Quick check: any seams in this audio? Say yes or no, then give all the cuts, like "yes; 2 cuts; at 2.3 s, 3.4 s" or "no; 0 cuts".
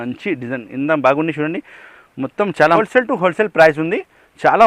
yes; 1 cut; at 2.8 s